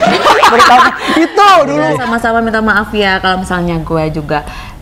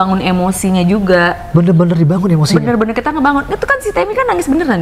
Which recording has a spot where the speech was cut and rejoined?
first; 1 cut; at 1.9 s

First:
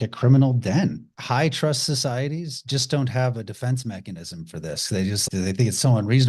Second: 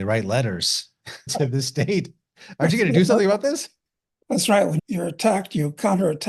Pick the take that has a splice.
first; 2 cuts; at 1.1 s, 5.2 s

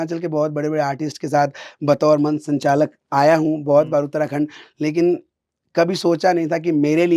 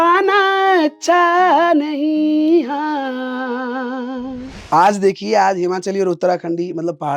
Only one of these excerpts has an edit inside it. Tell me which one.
second; 1 cut; at 4.5 s

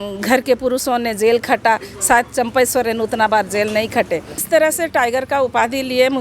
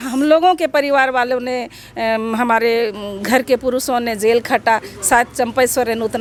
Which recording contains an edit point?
first; 1 cut; at 4.4 s

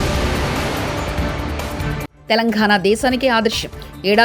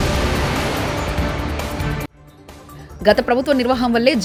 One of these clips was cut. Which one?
first; 1 cut; at 2.1 s

